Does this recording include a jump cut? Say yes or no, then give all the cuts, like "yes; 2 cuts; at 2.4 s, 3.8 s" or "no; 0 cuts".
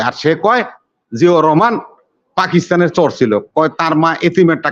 no; 0 cuts